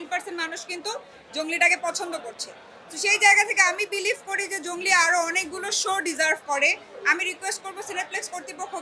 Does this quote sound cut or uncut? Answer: uncut